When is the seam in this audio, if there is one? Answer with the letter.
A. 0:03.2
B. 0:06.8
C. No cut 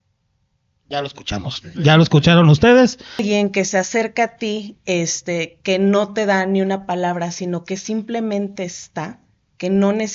A